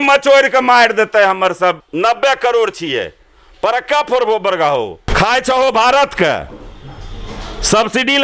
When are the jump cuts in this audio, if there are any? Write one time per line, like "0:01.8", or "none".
0:05.0